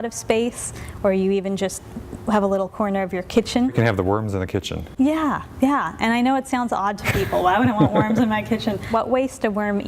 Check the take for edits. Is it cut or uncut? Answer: cut